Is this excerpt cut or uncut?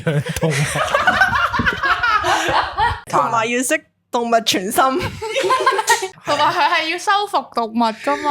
cut